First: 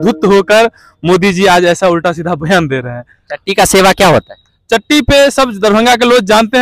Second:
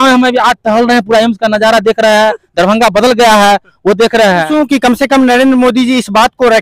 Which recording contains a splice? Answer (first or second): second